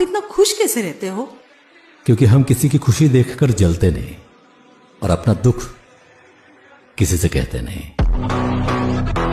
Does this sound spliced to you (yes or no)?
no